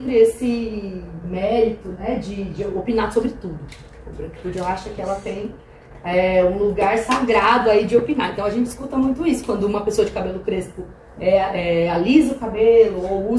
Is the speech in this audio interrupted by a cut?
no; 0 cuts

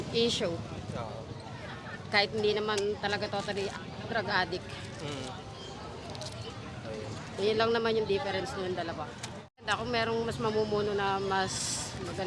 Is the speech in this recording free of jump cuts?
no; 1 cut; at 9.7 s

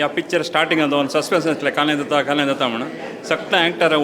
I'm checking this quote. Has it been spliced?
no; 0 cuts

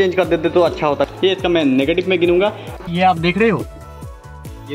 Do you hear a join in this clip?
yes; 2 cuts; at 1.0 s, 2.8 s

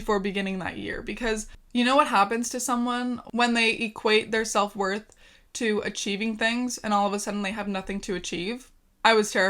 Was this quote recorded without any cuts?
no; 1 cut; at 1.6 s

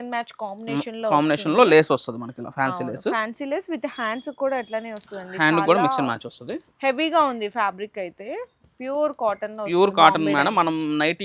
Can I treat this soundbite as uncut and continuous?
yes; 0 cuts

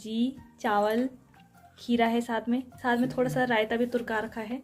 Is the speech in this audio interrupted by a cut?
no; 0 cuts

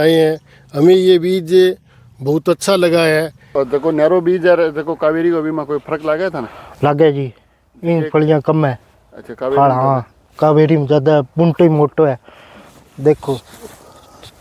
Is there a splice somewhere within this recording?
yes; 1 cut; at 3.5 s

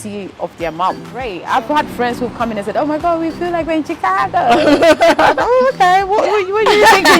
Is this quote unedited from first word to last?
no; 1 cut; at 1.3 s

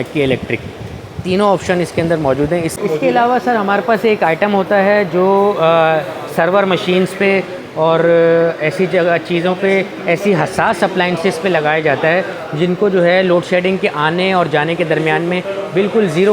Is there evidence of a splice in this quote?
yes; 1 cut; at 2.7 s

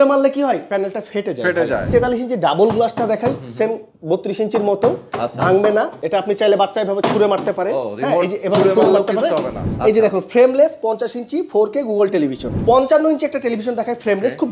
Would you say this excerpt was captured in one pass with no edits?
no; 4 cuts; at 1.9 s, 6.0 s, 9.7 s, 12.5 s

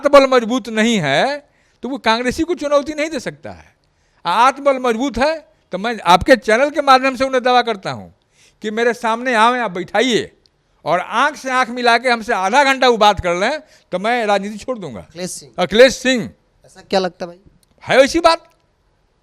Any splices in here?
no; 0 cuts

